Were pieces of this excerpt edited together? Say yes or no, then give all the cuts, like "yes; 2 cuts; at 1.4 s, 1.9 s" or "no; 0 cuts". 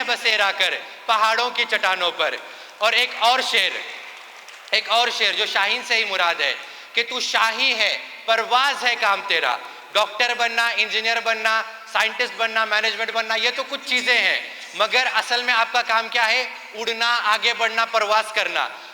no; 0 cuts